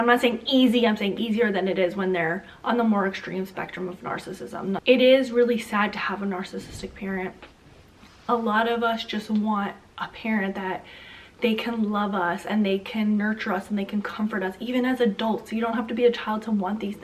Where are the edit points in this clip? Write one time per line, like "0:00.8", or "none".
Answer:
0:04.8